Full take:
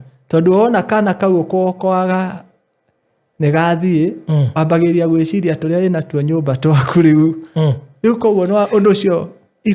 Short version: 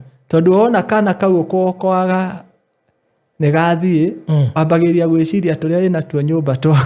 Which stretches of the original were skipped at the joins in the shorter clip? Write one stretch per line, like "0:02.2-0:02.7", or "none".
none